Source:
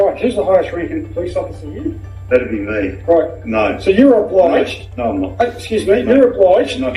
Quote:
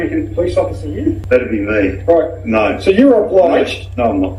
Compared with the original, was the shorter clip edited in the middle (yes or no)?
yes